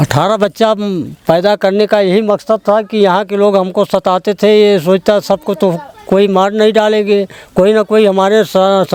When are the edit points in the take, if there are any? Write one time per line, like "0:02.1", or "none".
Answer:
none